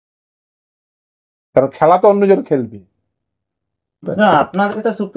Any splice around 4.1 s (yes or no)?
yes